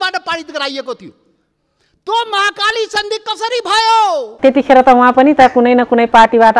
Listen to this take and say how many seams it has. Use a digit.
1